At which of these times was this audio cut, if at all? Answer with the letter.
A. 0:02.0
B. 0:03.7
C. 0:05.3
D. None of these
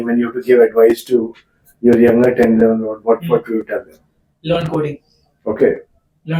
D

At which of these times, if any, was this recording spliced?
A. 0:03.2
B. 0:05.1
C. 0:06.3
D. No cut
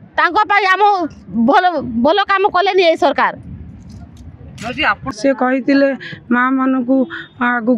B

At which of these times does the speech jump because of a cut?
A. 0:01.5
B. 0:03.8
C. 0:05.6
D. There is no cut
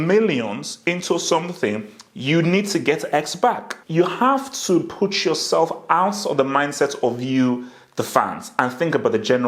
B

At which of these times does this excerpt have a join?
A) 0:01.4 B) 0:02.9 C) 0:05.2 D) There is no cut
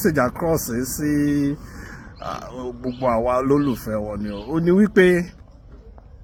D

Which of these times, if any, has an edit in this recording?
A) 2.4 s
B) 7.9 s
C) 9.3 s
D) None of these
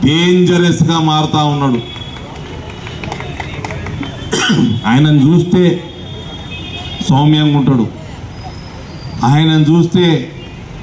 D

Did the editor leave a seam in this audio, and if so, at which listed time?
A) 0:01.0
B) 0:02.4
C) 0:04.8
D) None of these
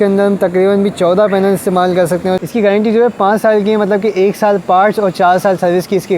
B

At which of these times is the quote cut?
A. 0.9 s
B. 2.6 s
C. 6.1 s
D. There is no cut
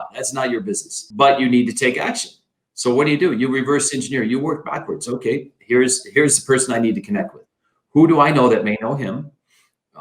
A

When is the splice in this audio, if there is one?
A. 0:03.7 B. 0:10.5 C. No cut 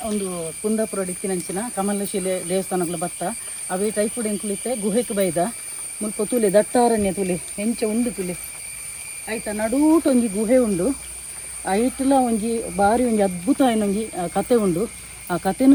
C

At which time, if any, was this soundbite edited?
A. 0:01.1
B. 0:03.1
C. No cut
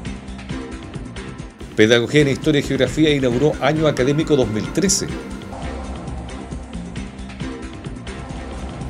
A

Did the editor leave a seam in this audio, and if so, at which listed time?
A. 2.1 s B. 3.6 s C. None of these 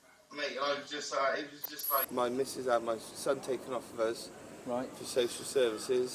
A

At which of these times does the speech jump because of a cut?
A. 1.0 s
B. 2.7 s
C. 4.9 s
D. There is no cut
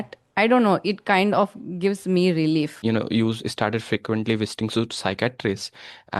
B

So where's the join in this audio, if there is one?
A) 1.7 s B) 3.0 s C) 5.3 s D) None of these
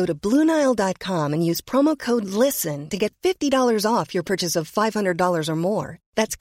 D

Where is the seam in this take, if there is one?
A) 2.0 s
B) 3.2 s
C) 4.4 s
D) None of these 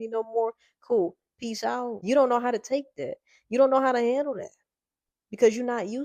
A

